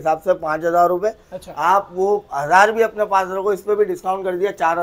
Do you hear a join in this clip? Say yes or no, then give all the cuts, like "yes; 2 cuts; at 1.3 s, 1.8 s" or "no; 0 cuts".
no; 0 cuts